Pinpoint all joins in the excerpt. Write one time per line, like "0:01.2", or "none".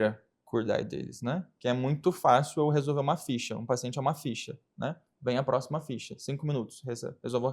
0:02.0